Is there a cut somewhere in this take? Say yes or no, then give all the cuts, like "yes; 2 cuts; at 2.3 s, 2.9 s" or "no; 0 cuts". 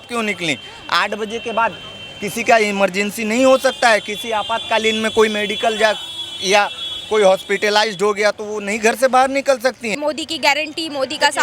yes; 1 cut; at 9.9 s